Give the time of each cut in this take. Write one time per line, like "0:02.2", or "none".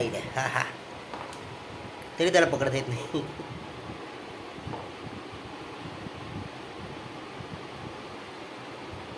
none